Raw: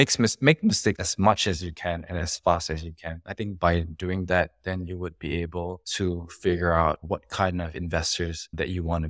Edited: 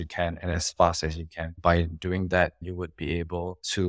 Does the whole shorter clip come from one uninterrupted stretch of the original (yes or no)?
no